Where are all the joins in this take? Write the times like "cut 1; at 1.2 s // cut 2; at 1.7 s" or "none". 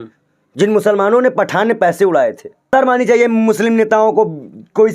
cut 1; at 2.5 s